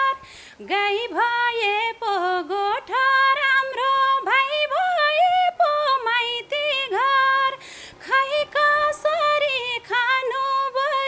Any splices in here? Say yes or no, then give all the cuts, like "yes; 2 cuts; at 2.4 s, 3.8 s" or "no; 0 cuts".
no; 0 cuts